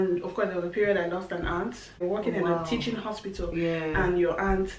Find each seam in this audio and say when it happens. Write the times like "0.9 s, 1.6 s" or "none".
2.0 s